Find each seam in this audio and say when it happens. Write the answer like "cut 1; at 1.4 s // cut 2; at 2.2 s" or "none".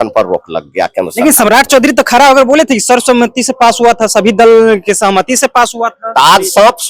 none